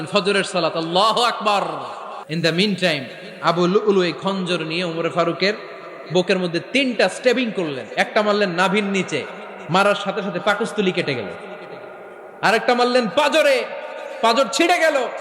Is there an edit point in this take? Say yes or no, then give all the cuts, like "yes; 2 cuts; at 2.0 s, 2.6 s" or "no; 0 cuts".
yes; 1 cut; at 2.2 s